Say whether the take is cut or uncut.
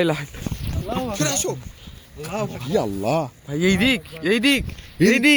uncut